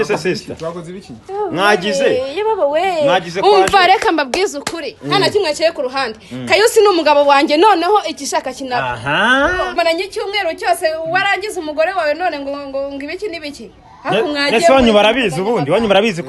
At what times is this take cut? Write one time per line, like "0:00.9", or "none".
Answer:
0:09.7